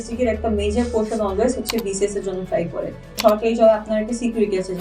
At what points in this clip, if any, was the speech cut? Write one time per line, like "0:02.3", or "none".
0:03.2